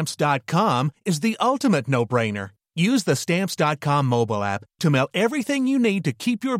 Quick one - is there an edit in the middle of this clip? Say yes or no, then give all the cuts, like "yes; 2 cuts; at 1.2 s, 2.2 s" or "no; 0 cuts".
no; 0 cuts